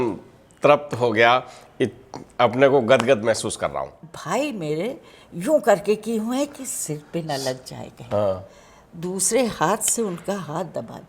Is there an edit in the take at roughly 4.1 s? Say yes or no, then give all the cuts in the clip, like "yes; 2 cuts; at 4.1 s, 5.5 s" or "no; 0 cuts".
yes; 1 cut; at 4.1 s